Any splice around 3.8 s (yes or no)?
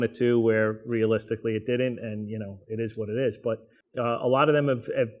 yes